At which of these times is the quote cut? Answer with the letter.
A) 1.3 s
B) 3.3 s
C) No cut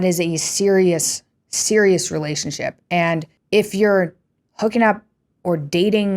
B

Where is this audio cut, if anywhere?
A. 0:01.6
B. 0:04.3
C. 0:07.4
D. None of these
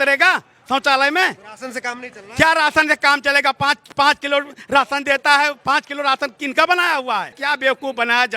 C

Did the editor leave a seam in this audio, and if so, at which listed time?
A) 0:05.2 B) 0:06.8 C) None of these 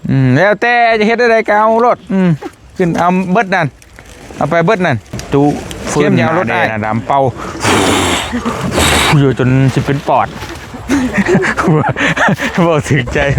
A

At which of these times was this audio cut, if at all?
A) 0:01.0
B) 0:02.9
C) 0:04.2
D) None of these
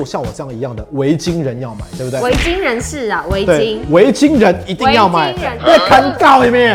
D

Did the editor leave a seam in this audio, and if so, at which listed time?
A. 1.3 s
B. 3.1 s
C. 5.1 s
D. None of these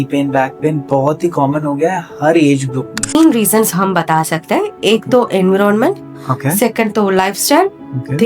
B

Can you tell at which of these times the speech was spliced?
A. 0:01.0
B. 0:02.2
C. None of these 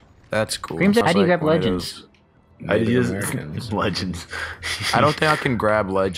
A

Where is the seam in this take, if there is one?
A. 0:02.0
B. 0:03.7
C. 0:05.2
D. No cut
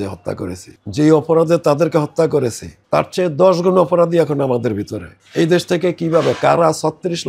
C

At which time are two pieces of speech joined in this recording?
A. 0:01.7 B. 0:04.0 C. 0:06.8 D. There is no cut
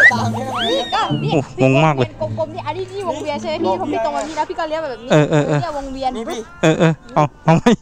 B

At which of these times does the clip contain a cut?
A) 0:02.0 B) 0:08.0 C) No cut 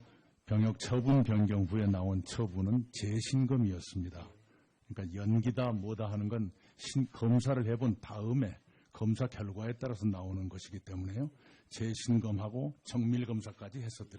A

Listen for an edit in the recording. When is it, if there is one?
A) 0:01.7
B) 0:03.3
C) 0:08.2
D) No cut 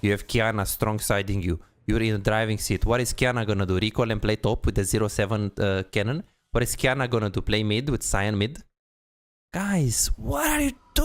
D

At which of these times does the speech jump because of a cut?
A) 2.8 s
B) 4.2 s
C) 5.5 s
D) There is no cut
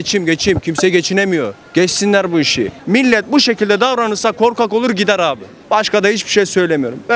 A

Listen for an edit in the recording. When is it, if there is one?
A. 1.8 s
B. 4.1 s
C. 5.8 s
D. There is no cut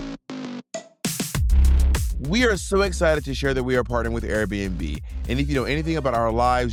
D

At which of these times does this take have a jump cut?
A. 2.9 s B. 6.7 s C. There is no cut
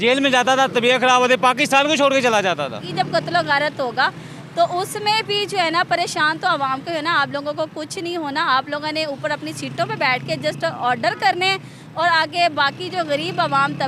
A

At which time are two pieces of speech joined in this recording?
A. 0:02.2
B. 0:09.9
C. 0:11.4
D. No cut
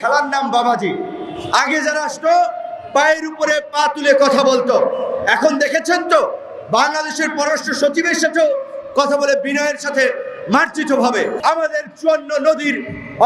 C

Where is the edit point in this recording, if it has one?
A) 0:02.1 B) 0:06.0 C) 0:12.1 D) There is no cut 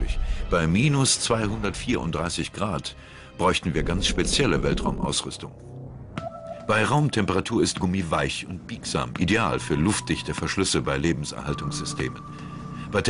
D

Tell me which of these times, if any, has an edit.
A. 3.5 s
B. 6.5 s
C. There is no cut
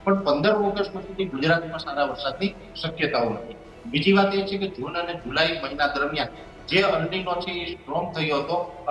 C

